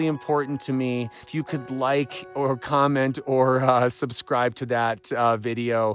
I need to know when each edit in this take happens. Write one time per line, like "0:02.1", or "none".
0:01.3